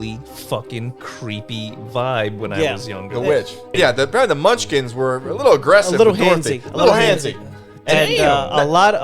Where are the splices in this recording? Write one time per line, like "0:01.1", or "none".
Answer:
0:03.7